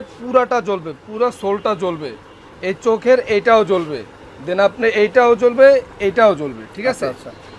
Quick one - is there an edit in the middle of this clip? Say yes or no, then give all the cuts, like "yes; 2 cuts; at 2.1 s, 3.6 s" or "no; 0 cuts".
no; 0 cuts